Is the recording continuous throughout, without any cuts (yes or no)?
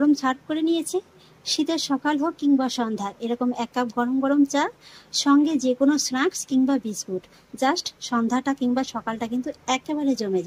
yes